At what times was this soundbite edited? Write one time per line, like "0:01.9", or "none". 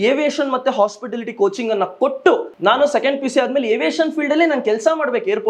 0:02.5